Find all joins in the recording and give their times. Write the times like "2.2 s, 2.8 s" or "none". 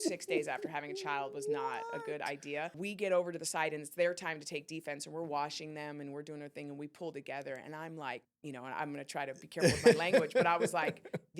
2.8 s, 8.3 s